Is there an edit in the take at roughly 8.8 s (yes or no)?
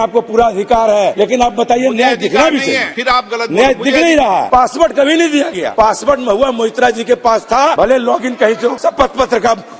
yes